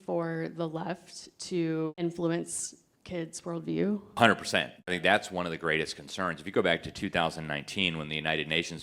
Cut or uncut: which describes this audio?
cut